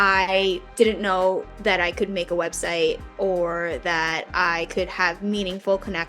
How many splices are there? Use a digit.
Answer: 0